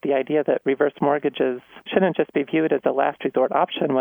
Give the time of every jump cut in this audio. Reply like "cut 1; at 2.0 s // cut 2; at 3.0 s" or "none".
cut 1; at 1.7 s